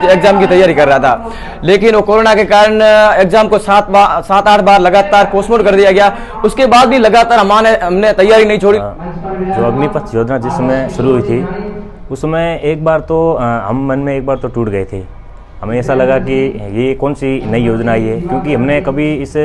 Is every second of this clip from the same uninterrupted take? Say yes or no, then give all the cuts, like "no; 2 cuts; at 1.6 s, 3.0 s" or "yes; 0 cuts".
no; 1 cut; at 8.8 s